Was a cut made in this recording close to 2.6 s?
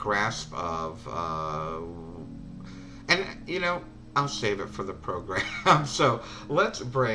no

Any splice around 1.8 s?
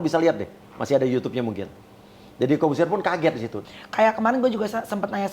no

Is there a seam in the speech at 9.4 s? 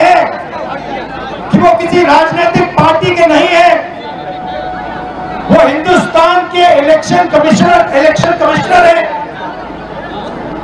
no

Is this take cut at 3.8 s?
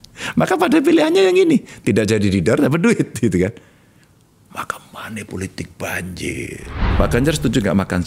no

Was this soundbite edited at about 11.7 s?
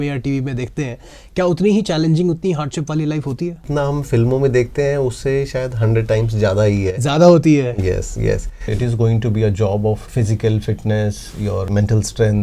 yes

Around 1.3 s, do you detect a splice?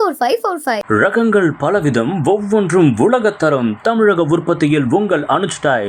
no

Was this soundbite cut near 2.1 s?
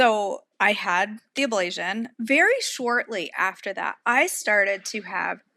yes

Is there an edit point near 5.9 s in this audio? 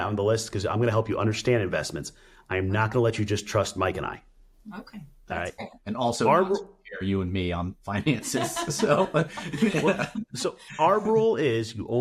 no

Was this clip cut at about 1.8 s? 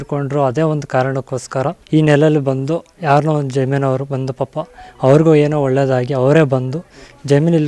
yes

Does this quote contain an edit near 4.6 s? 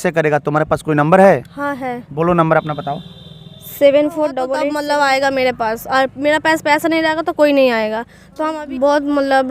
yes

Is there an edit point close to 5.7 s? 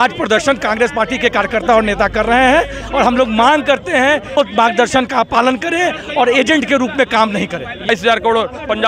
no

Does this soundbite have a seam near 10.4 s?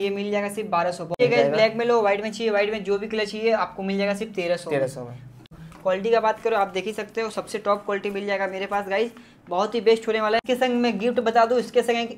yes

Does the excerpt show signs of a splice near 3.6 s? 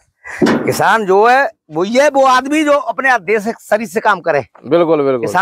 no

